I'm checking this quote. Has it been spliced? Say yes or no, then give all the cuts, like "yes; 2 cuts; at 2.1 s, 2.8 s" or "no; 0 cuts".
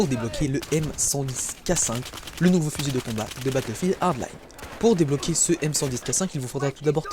no; 0 cuts